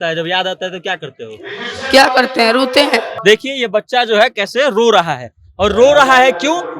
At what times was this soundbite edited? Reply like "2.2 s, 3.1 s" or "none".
3.1 s